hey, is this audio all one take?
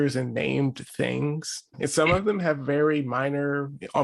no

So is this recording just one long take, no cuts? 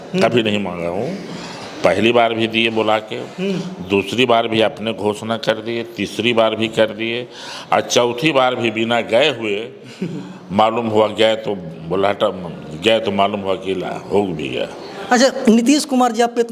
yes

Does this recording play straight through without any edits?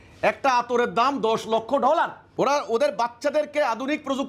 no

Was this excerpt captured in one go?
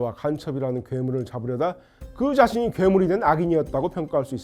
yes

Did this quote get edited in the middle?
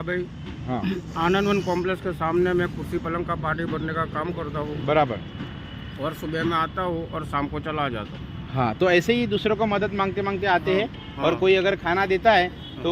no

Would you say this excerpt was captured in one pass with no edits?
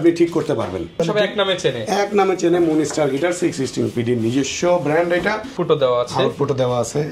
no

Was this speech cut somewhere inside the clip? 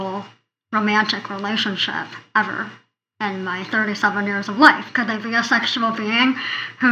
yes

